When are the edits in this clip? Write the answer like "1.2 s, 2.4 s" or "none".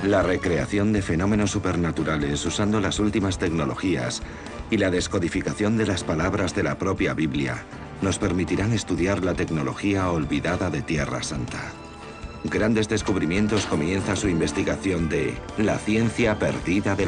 9.4 s